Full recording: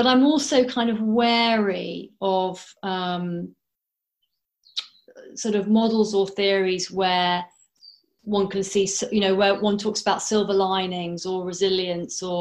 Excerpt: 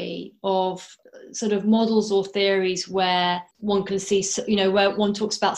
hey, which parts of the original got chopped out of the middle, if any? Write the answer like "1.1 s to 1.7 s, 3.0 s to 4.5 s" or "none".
2.7 s to 4.9 s, 7.5 s to 8.1 s